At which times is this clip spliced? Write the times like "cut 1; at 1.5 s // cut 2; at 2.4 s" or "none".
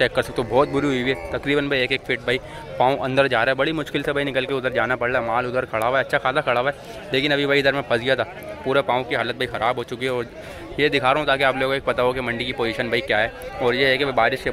none